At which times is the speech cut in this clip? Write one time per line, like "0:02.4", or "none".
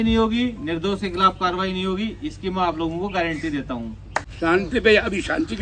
0:04.3